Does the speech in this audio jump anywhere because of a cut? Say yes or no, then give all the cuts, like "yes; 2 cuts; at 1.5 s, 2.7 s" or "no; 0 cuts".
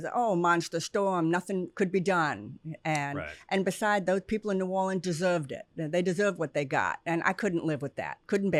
no; 0 cuts